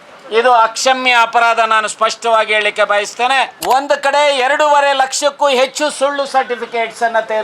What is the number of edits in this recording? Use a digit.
1